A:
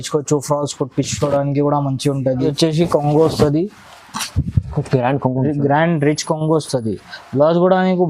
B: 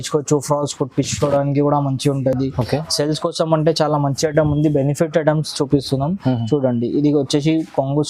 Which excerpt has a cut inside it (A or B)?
A